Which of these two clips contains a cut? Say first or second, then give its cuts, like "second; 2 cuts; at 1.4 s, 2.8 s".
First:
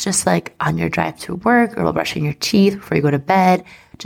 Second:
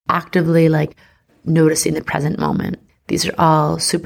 second; 1 cut; at 2.9 s